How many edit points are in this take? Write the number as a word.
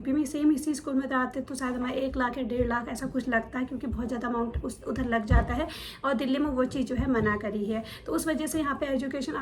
zero